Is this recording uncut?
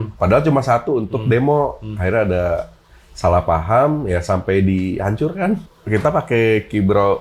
no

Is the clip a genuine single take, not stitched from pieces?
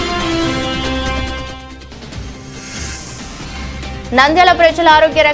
no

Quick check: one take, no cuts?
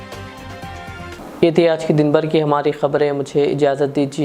yes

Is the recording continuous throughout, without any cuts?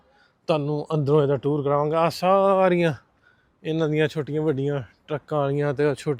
yes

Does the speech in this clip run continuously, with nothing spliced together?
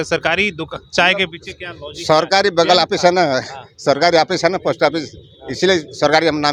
yes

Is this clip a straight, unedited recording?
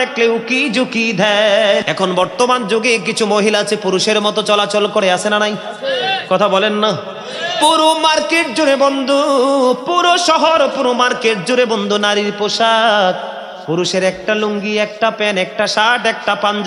no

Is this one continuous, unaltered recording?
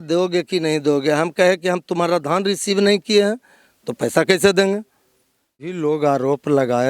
no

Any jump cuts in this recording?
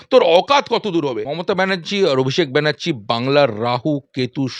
yes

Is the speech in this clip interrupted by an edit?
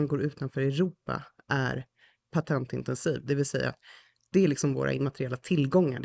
no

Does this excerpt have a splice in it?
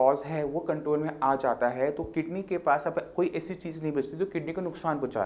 no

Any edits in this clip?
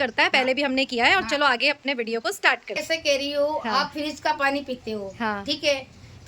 yes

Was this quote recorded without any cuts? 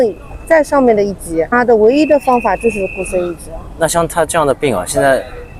yes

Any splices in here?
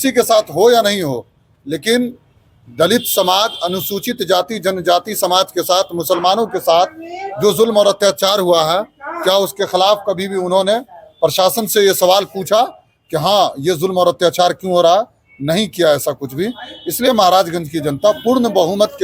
no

